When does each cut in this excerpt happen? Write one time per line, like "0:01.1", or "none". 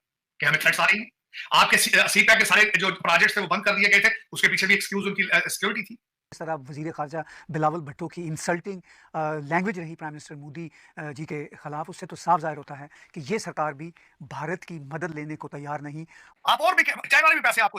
0:06.3
0:16.2